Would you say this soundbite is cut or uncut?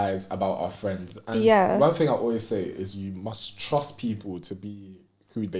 uncut